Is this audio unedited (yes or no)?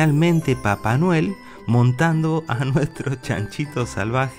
yes